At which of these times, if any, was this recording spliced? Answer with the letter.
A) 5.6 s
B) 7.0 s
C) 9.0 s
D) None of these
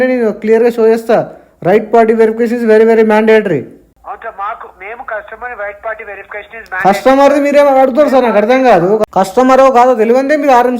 C